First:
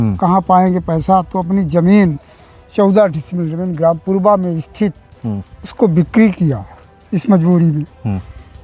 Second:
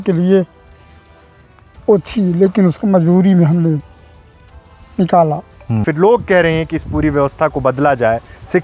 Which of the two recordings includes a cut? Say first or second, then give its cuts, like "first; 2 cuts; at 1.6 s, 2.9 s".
second; 1 cut; at 5.8 s